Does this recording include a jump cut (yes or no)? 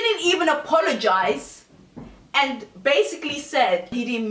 no